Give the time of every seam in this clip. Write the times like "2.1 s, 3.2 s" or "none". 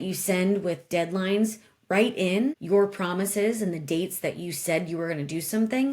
2.6 s